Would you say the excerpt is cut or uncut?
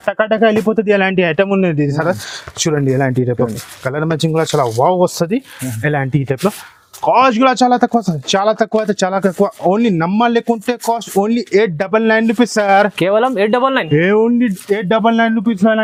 uncut